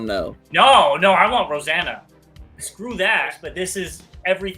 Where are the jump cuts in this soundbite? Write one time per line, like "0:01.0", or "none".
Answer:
0:03.4